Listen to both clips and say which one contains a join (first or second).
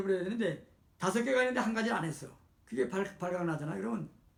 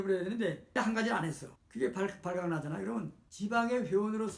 second